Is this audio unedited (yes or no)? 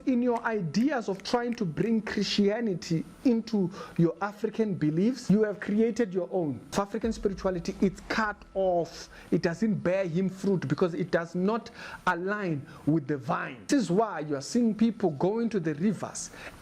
no